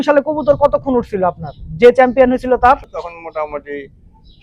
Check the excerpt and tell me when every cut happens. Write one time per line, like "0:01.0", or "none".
0:02.8